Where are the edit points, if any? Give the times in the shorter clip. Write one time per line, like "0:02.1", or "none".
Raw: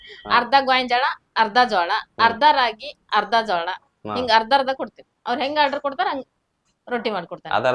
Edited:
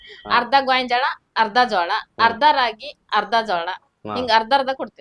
none